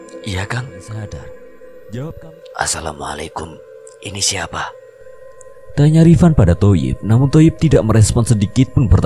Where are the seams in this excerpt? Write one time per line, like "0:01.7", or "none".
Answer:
0:02.1